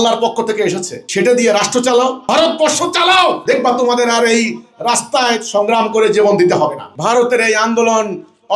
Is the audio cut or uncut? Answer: cut